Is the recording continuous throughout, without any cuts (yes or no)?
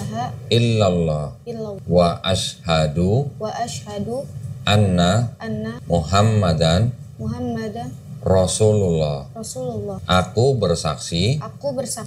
yes